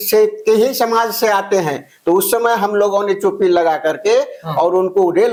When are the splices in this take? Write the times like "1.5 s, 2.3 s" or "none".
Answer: none